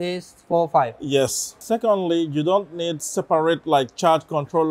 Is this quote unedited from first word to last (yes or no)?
no